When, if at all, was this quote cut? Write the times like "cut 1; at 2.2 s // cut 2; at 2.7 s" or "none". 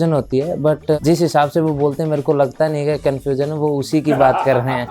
cut 1; at 1.0 s